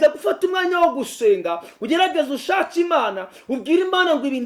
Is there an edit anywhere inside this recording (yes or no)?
no